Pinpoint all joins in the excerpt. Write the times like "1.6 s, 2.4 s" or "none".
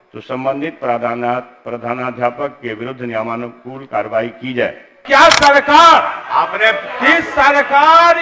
5.0 s